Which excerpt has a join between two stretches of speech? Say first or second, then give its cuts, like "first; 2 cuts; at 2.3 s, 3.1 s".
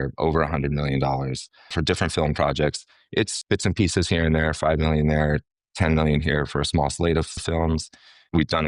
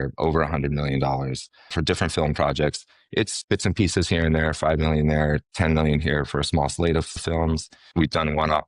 second; 2 cuts; at 5.5 s, 7.8 s